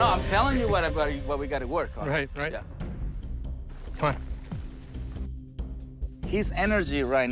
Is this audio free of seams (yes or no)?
no